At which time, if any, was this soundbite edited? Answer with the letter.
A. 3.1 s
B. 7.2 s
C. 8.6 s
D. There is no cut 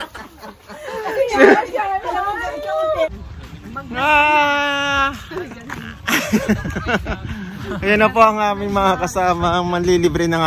A